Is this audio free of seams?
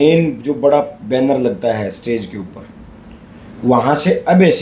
yes; 0 cuts

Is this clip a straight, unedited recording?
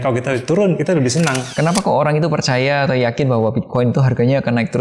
no; 1 cut; at 1.4 s

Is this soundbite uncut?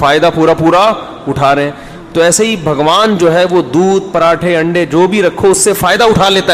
yes; 0 cuts

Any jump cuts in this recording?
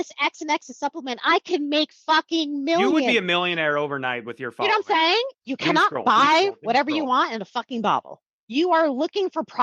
yes; 1 cut; at 5.4 s

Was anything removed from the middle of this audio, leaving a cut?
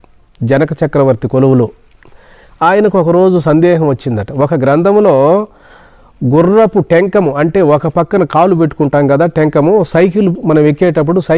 no; 0 cuts

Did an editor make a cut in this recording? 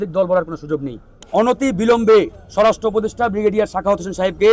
yes; 1 cut; at 1.2 s

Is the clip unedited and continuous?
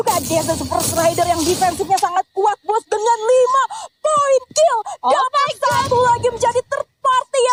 yes; 0 cuts

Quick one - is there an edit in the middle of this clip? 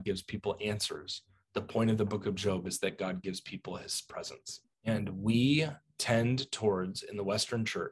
yes; 1 cut; at 4.7 s

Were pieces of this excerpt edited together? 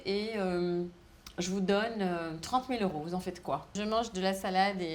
yes; 1 cut; at 3.8 s

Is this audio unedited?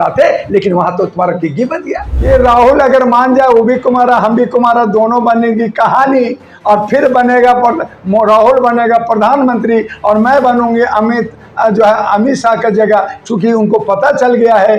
no; 1 cut; at 2.1 s

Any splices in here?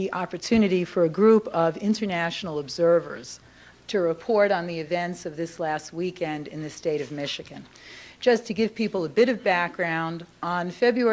no; 0 cuts

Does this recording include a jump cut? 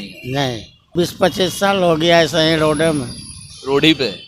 yes; 1 cut; at 0.9 s

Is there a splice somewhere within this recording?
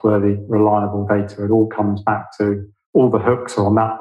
no; 0 cuts

